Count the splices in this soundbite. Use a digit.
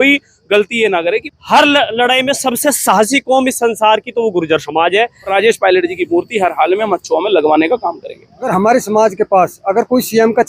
3